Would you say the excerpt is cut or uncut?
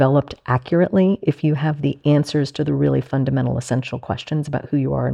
uncut